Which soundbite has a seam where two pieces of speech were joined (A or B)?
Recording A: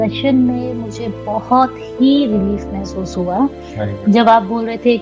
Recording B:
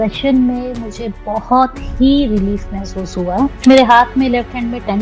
B